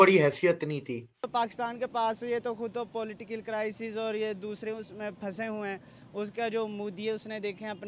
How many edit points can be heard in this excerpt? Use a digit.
1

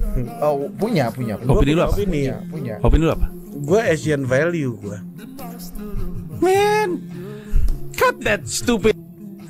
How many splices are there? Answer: 0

